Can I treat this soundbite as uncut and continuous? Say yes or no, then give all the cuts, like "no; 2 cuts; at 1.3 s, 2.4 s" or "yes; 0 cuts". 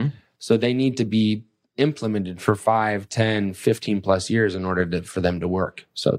yes; 0 cuts